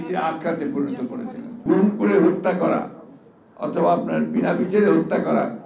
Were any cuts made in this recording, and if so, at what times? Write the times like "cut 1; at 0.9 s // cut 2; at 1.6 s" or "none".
cut 1; at 1.6 s